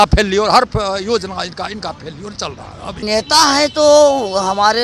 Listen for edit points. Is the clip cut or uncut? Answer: cut